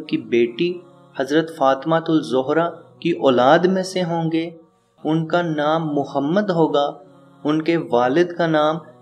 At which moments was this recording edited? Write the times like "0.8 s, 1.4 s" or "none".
2.9 s